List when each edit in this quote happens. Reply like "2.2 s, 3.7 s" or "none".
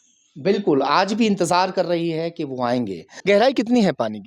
3.1 s